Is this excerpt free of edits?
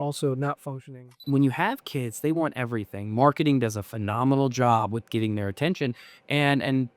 no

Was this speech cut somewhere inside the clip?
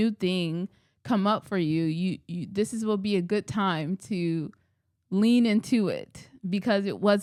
no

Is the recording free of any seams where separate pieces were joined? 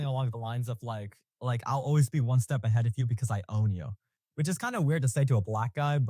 yes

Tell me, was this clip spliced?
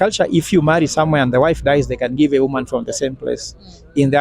no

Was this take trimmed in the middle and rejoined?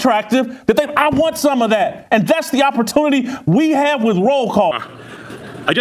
yes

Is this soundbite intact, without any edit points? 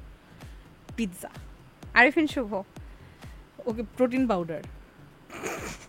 yes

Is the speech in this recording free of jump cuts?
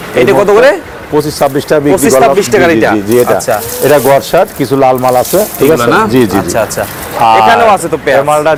yes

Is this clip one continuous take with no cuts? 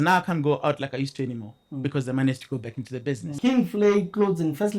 no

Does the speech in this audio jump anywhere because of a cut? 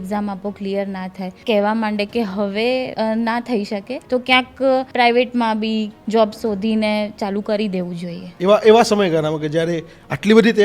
yes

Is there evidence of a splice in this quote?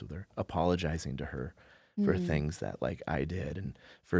no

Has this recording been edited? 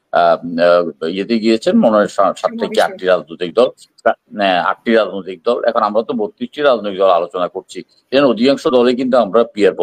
no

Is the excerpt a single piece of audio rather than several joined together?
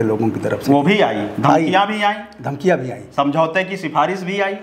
yes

